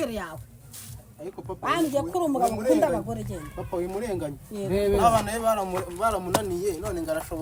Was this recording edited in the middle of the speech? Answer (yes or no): no